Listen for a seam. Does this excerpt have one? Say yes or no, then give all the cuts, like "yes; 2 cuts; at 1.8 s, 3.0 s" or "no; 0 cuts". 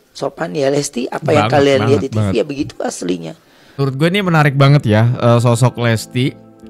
yes; 1 cut; at 3.7 s